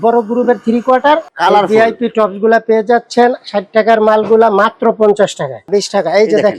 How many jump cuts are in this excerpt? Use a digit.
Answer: 2